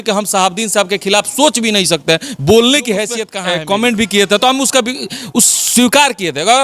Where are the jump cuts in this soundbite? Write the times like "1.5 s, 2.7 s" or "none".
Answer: 3.3 s